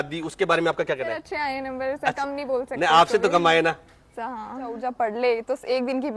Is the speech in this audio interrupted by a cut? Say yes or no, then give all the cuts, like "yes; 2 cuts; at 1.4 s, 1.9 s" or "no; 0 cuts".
yes; 2 cuts; at 1.2 s, 4.8 s